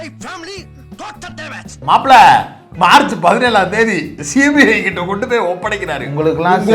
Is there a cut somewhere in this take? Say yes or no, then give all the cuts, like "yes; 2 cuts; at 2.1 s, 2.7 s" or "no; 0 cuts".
yes; 1 cut; at 1.8 s